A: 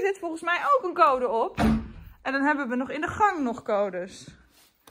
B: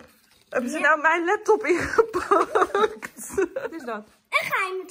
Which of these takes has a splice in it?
B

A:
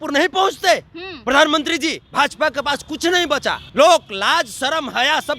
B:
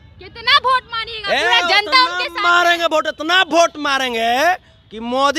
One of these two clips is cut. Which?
A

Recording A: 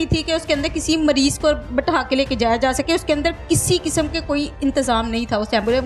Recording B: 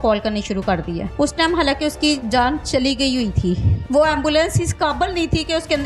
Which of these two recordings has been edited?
B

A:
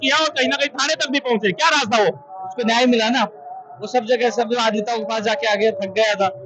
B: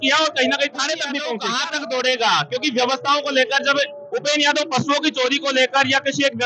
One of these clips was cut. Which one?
B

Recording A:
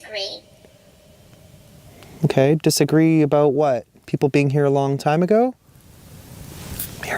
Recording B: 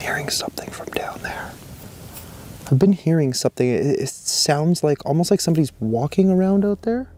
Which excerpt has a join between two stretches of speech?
A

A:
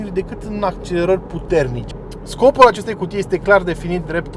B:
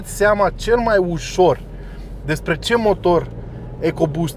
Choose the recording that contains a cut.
A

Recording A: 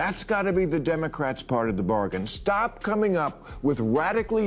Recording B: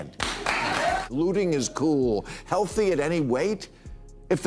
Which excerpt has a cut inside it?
B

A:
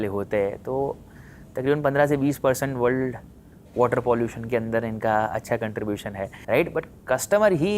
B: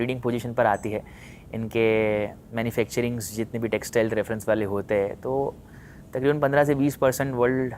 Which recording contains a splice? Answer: A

